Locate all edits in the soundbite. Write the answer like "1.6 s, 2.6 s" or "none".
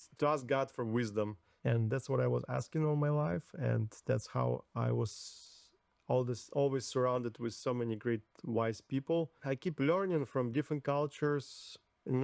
1.4 s, 9.4 s